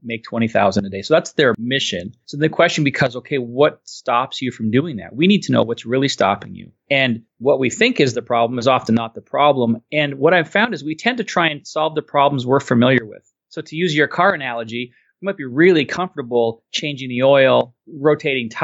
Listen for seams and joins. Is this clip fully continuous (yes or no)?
no